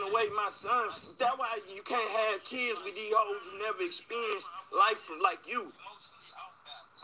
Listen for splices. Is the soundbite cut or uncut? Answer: uncut